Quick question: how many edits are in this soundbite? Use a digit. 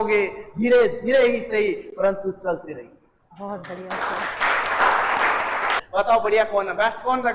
1